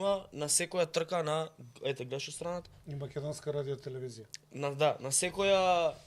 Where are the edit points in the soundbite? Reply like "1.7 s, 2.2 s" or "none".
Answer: none